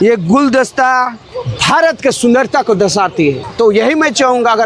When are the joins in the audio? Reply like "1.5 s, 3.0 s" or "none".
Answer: 3.4 s